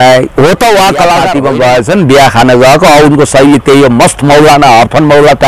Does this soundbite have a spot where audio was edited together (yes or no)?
yes